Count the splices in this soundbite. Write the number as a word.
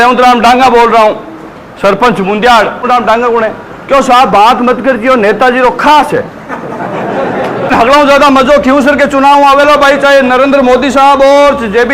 two